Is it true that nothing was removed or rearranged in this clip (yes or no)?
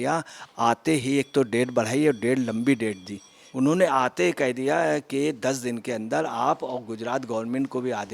no